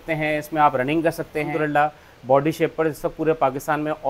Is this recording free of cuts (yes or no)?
no